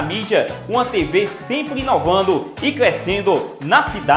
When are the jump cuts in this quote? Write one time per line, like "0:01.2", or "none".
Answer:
0:02.5